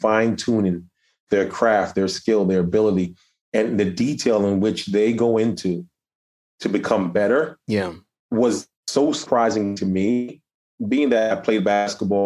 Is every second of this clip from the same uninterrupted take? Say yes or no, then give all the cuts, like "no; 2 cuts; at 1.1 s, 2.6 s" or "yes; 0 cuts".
yes; 0 cuts